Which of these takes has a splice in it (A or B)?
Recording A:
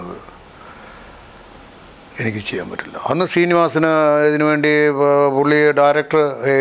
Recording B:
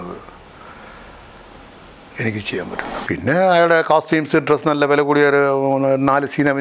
B